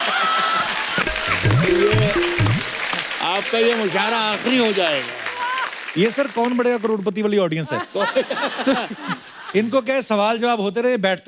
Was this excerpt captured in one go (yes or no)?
yes